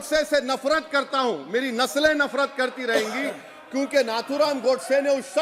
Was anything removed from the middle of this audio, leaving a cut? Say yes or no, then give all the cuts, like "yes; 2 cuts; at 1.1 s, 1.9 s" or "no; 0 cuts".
no; 0 cuts